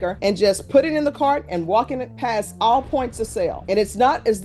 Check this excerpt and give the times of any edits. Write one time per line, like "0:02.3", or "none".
none